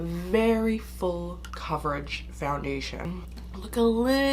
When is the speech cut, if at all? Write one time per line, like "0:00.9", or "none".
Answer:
0:01.5
0:03.2